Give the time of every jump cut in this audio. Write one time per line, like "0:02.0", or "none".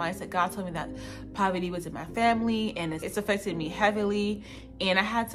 0:03.0